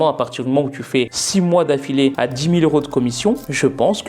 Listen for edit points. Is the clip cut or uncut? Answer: cut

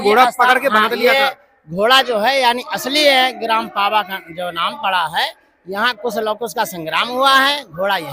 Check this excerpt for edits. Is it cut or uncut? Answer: uncut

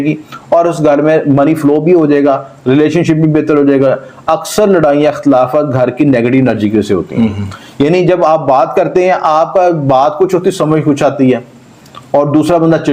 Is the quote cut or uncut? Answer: uncut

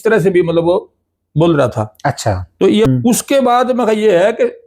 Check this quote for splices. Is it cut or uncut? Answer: cut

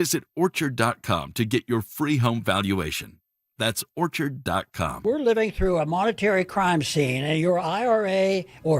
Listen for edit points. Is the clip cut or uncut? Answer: cut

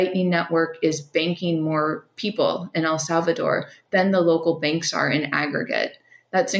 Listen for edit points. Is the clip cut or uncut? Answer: uncut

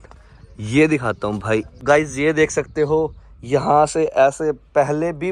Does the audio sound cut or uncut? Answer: cut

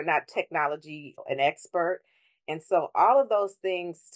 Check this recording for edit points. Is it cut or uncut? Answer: cut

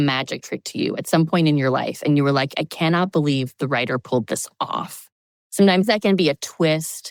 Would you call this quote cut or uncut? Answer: uncut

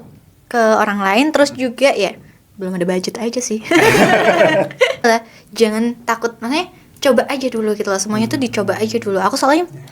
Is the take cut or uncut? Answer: cut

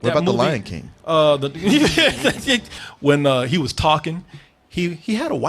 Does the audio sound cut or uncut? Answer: cut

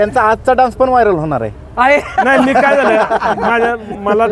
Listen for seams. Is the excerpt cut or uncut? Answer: uncut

